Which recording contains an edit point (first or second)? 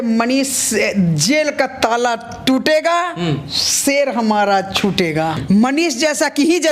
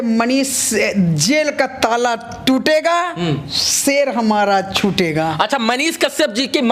first